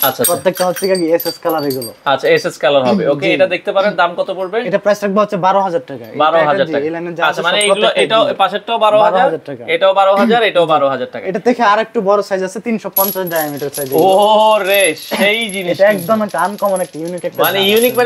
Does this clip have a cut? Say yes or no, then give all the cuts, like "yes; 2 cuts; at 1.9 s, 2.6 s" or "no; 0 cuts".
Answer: no; 0 cuts